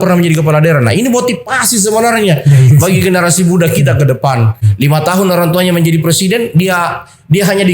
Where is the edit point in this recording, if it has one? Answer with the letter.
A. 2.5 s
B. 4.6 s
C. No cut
B